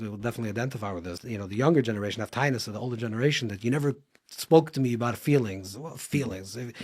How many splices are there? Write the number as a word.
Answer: one